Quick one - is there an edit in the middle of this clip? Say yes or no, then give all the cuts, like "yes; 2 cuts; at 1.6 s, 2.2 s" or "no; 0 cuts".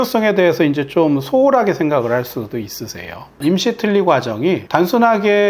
yes; 2 cuts; at 3.3 s, 4.6 s